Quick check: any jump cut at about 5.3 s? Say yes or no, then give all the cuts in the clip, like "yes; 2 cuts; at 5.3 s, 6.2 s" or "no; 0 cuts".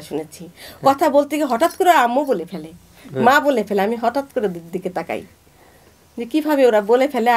no; 0 cuts